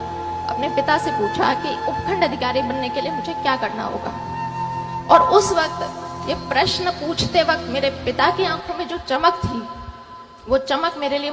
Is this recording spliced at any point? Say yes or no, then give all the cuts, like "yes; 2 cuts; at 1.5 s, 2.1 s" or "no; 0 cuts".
no; 0 cuts